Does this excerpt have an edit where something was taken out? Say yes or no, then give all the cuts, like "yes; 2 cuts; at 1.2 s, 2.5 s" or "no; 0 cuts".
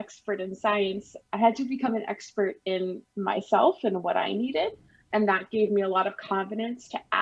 yes; 1 cut; at 5.0 s